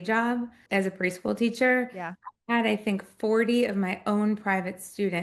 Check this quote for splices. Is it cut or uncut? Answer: uncut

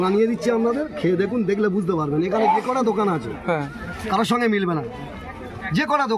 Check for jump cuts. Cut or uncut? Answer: uncut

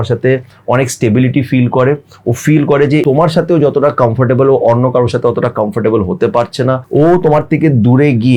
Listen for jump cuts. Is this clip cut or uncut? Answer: cut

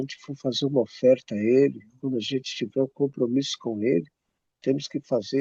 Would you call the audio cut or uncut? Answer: uncut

